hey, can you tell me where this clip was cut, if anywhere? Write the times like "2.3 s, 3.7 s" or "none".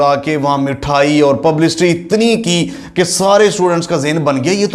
none